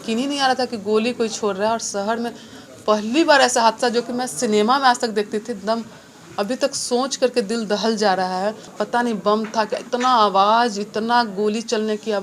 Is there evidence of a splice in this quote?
yes; 1 cut; at 8.7 s

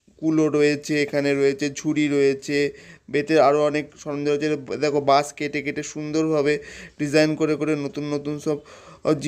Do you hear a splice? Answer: no; 0 cuts

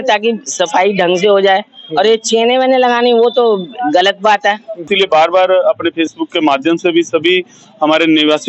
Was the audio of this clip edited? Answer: yes; 1 cut; at 4.9 s

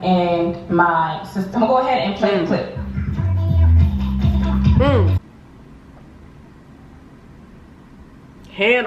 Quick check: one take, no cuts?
no; 1 cut; at 5.1 s

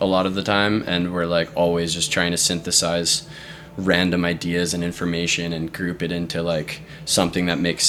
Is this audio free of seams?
yes; 0 cuts

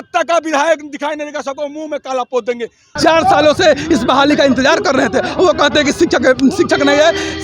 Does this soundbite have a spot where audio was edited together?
yes; 1 cut; at 3.0 s

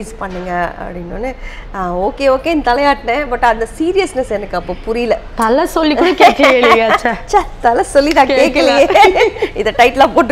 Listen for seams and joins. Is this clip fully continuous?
yes; 0 cuts

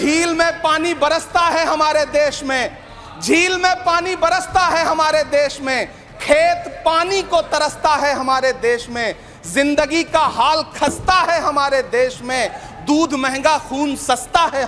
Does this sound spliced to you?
no; 0 cuts

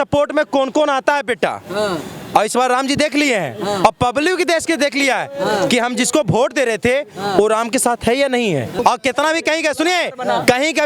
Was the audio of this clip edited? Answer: yes; 1 cut; at 8.8 s

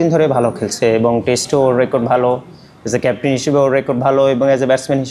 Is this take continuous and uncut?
yes; 0 cuts

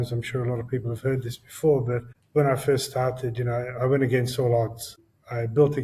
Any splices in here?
yes; 1 cut; at 2.1 s

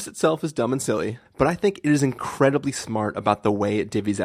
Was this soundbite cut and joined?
yes; 1 cut; at 1.2 s

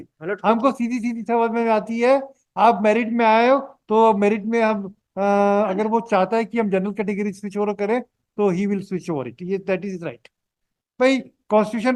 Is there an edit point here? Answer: no; 0 cuts

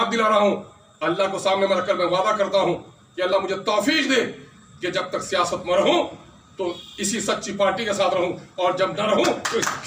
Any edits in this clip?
no; 0 cuts

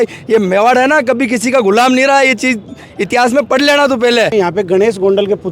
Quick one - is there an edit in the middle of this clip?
yes; 1 cut; at 4.3 s

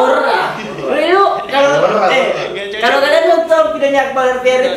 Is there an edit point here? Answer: no; 0 cuts

